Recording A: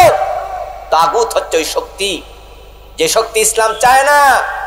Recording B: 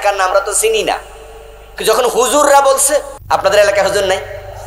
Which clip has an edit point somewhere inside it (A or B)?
B